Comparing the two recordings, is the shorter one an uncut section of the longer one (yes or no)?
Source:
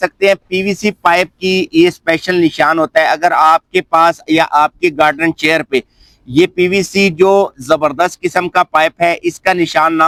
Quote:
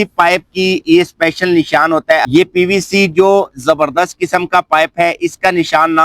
no